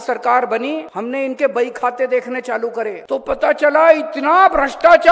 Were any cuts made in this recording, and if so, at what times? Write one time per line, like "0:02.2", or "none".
0:00.9
0:03.0